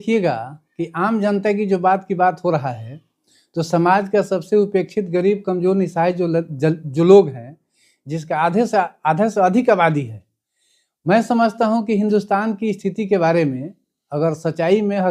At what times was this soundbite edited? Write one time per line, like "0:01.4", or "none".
none